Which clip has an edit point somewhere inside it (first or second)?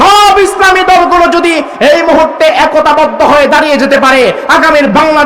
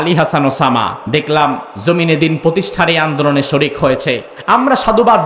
second